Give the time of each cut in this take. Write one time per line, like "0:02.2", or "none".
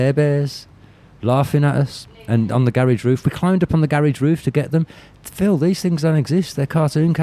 none